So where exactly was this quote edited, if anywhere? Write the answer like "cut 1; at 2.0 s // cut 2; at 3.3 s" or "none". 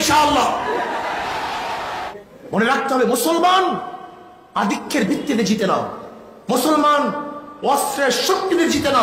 cut 1; at 2.1 s